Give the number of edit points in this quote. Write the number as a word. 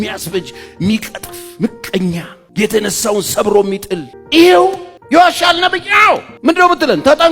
four